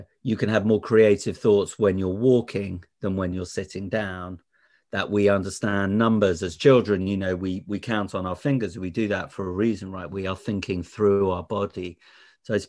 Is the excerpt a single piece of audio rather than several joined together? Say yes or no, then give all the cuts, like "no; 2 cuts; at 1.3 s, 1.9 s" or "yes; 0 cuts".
no; 1 cut; at 4.7 s